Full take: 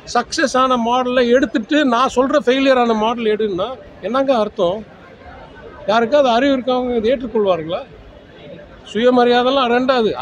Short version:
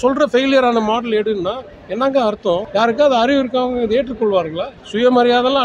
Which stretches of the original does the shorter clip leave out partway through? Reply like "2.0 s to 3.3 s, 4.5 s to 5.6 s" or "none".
4.8 s to 5.8 s, 7.9 s to 8.8 s